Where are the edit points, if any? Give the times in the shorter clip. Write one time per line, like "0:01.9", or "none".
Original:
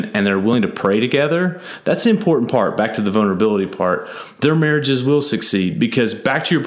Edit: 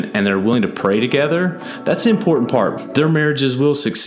0:02.7

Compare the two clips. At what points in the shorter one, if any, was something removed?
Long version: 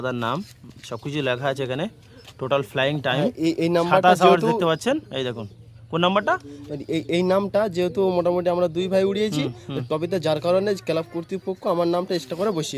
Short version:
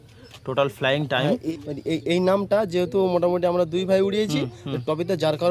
0:01.4

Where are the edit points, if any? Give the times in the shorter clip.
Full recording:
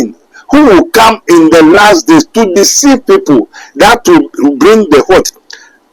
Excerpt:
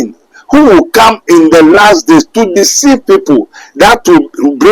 none

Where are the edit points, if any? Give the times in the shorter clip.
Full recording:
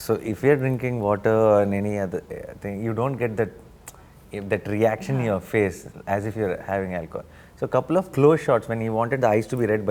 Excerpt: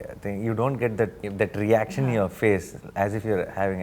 0:01.2

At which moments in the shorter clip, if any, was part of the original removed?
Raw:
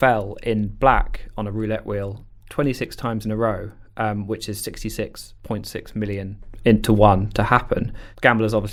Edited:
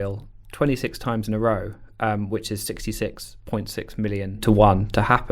0:04.4

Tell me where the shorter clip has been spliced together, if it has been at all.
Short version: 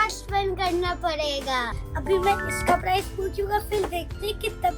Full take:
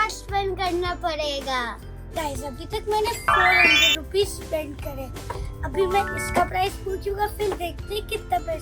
0:01.8

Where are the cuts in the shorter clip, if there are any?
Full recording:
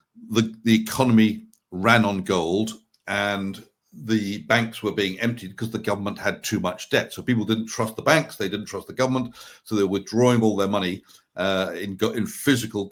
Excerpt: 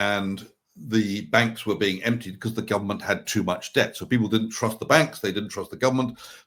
none

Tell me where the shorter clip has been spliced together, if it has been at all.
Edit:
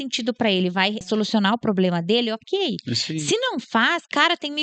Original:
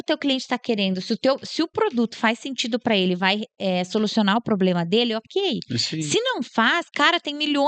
0:01.0

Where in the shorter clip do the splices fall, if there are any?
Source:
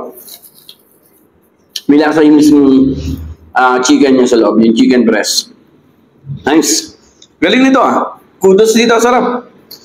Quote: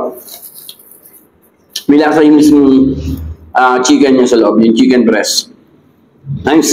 none

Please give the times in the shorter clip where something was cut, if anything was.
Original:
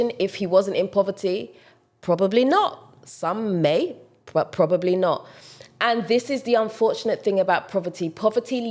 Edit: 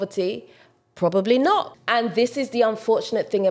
0:01.8

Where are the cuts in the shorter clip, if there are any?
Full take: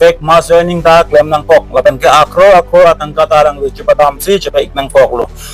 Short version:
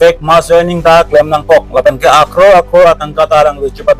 none

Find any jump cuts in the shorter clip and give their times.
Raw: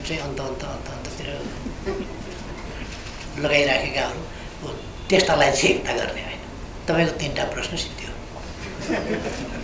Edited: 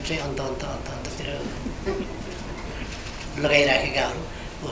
none

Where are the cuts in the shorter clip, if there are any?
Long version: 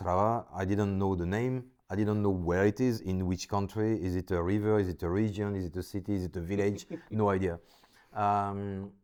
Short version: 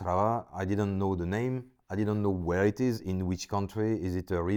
none

